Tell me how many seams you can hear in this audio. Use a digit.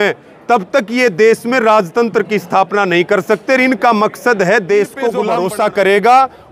1